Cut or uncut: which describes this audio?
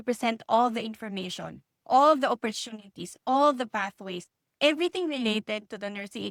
uncut